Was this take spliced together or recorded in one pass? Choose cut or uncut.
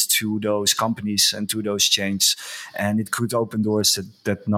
uncut